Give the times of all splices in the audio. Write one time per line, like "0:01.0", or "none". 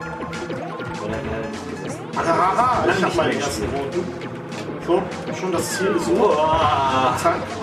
0:04.6